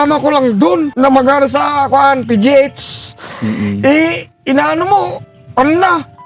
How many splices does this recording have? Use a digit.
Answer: 1